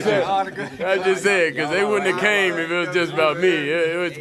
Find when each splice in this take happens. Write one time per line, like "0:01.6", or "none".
none